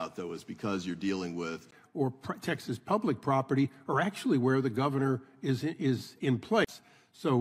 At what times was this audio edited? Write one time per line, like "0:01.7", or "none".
none